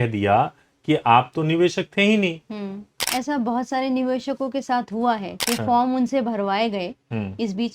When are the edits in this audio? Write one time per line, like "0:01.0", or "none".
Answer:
0:03.0